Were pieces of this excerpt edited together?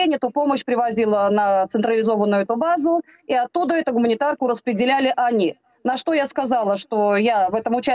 no; 0 cuts

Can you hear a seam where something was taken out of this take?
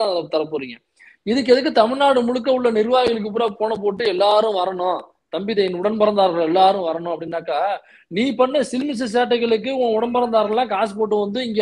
no; 0 cuts

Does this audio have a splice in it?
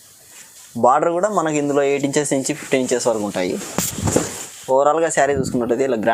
no; 0 cuts

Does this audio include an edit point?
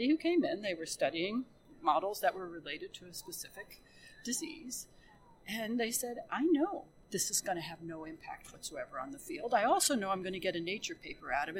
yes; 2 cuts; at 1.6 s, 7.0 s

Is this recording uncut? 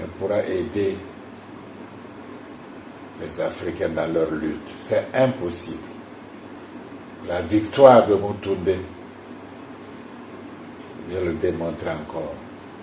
yes; 0 cuts

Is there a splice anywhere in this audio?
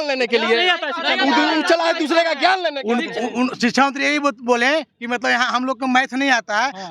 no; 0 cuts

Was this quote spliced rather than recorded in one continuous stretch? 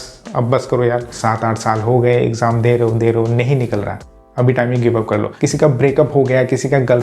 yes; 2 cuts; at 1.1 s, 5.3 s

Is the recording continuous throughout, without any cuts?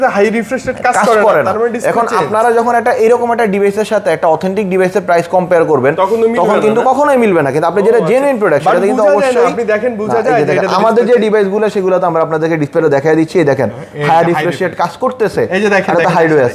yes; 0 cuts

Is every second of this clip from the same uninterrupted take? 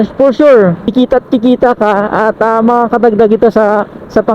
no; 1 cut; at 0.9 s

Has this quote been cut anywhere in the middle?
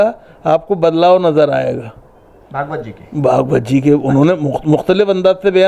no; 0 cuts

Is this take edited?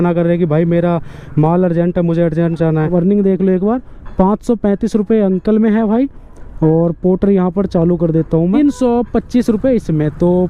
yes; 2 cuts; at 2.9 s, 8.5 s

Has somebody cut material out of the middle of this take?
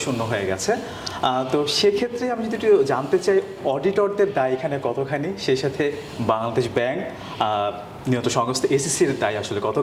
no; 0 cuts

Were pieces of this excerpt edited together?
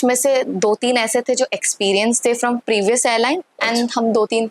no; 0 cuts

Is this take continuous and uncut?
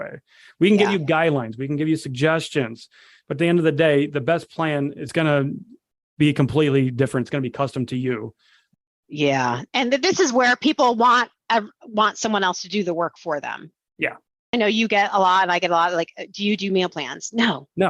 no; 2 cuts; at 5.0 s, 14.5 s

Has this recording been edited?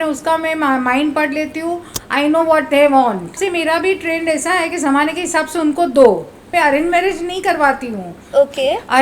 yes; 2 cuts; at 3.4 s, 6.4 s

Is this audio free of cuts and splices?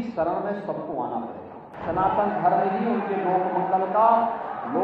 no; 1 cut; at 1.7 s

